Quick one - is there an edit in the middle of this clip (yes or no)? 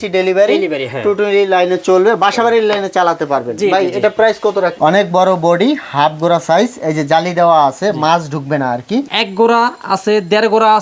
yes